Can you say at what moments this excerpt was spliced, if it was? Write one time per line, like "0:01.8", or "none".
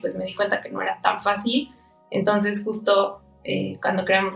none

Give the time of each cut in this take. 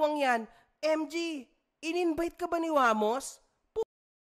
none

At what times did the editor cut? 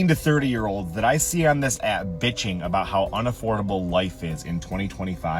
none

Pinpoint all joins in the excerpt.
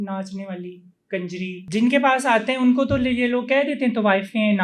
0:01.6

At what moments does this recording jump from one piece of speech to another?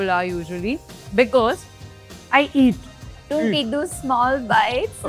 0:01.0
0:03.3

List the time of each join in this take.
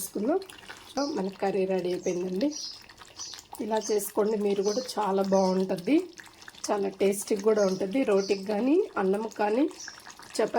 0:01.0

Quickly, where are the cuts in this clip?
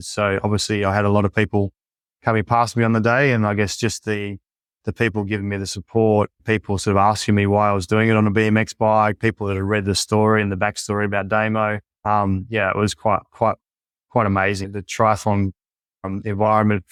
none

